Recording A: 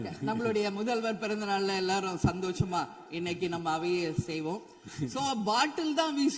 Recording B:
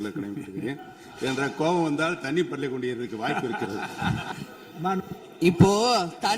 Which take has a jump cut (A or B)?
B